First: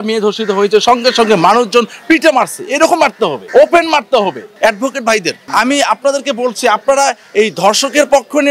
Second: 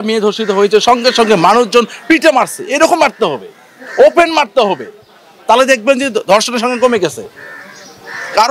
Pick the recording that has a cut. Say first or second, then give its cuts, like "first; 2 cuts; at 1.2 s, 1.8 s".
first; 3 cuts; at 3.4 s, 4.5 s, 5.4 s